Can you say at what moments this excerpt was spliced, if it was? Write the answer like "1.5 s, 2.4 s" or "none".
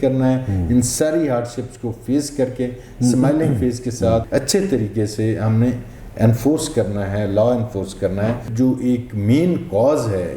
4.3 s, 8.4 s